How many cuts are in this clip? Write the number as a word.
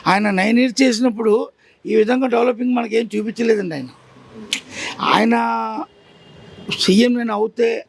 zero